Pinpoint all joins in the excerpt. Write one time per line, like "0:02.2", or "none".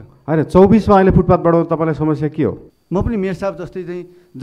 0:02.7